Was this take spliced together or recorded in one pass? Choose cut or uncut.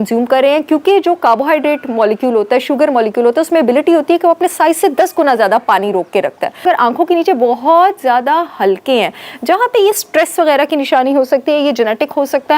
cut